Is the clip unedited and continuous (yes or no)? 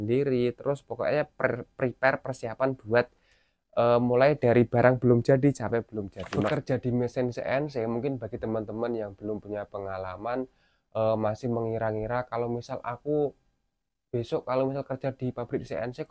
no